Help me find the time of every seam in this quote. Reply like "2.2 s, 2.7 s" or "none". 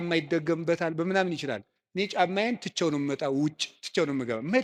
none